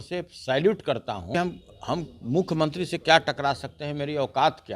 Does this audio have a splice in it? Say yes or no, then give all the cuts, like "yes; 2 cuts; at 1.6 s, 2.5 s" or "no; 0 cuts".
yes; 1 cut; at 1.3 s